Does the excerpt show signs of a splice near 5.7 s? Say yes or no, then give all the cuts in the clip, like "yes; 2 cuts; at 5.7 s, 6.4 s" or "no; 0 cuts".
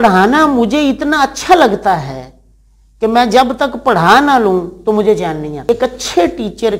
yes; 1 cut; at 5.7 s